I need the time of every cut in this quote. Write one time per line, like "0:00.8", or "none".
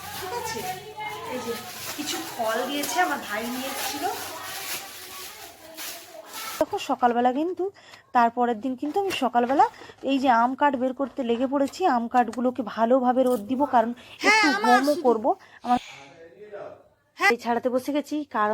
0:06.6
0:17.3